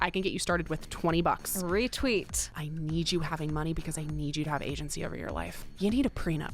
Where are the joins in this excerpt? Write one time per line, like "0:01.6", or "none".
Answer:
0:02.6
0:05.7